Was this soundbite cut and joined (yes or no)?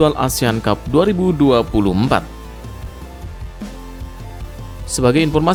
no